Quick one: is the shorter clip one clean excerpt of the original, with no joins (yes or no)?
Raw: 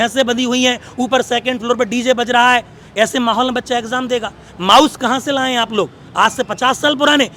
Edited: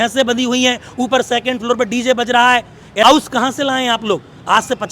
no